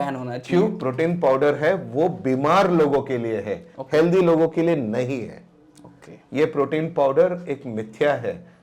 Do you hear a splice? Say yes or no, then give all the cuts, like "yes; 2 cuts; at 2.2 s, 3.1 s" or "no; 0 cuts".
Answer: no; 0 cuts